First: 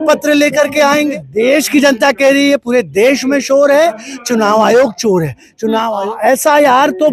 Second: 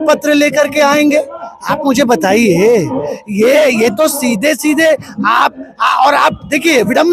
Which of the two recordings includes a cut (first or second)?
first